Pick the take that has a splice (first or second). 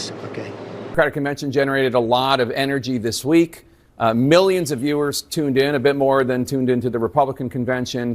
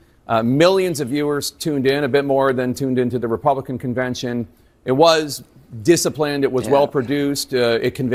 first